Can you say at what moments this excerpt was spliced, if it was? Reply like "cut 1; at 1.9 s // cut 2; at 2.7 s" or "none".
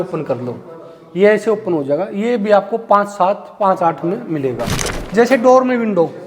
cut 1; at 4.8 s